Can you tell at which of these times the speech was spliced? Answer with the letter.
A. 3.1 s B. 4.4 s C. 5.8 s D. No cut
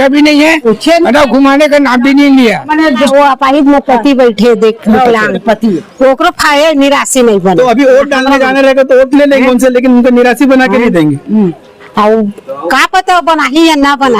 A